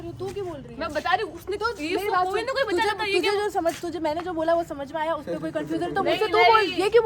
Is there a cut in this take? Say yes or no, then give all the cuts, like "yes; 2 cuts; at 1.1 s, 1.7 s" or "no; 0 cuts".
no; 0 cuts